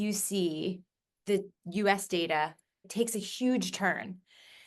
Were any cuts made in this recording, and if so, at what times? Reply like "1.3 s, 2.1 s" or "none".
2.9 s